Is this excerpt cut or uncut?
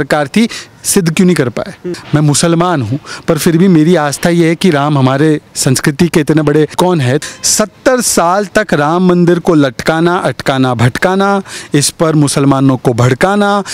cut